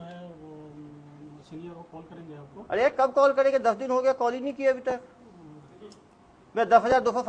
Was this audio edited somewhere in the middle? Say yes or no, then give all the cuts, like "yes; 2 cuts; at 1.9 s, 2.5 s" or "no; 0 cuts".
no; 0 cuts